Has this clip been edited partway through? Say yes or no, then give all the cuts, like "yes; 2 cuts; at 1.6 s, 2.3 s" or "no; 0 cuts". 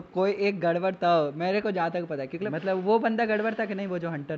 yes; 1 cut; at 2.4 s